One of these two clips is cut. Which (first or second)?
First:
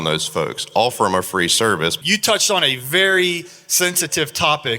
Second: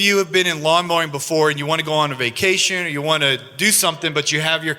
first